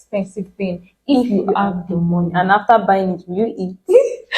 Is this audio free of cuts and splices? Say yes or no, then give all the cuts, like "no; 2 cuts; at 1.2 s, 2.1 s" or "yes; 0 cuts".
yes; 0 cuts